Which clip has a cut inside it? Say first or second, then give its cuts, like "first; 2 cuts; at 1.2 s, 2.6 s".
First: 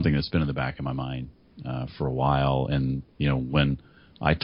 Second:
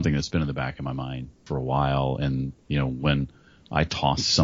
second; 1 cut; at 1.4 s